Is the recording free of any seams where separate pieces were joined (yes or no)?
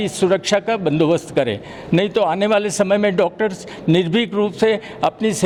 yes